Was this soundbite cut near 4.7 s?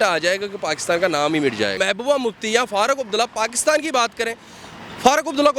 no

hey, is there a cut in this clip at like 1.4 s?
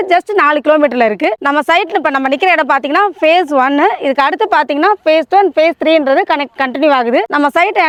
no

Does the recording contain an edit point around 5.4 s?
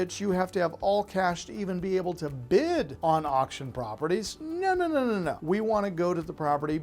yes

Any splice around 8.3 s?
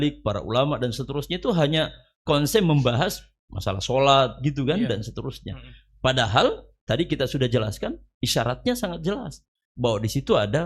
no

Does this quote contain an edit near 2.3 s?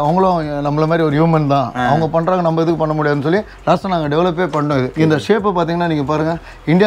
no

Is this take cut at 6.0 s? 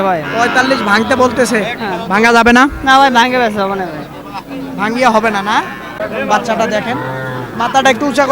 yes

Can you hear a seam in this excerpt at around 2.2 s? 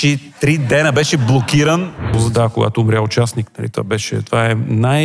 yes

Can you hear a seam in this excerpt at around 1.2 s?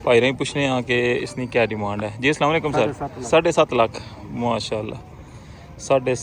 no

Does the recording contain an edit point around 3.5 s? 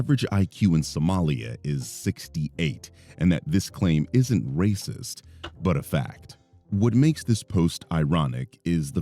yes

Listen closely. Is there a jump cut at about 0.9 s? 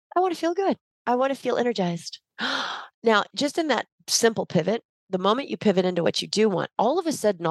yes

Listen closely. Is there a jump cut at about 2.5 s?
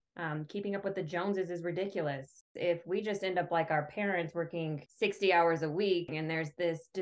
yes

